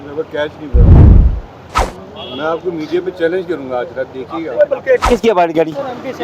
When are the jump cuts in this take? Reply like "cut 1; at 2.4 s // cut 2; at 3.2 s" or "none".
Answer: cut 1; at 5.0 s

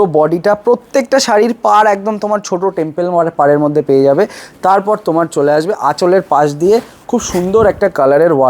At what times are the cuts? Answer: none

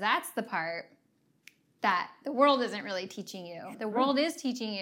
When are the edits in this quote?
cut 1; at 3.7 s

